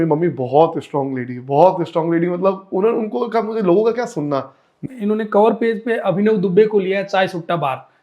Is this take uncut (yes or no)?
no